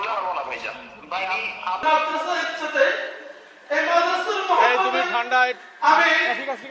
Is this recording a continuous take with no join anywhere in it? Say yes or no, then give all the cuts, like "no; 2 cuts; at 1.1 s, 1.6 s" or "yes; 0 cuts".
no; 1 cut; at 1.8 s